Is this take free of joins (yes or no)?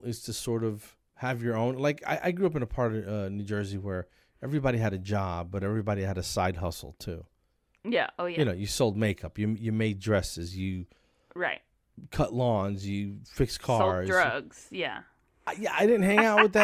yes